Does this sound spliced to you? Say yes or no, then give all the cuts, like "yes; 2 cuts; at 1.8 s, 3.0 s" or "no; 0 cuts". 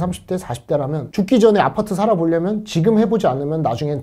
no; 0 cuts